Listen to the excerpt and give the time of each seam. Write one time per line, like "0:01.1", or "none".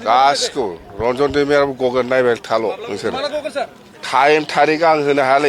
none